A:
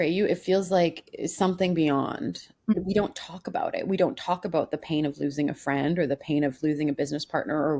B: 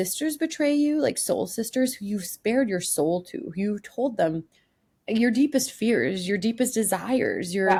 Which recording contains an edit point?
A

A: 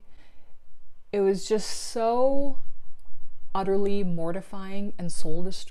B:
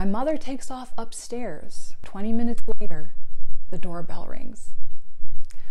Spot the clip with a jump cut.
B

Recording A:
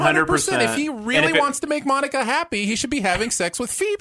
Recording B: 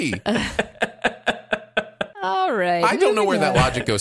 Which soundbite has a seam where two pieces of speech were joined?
B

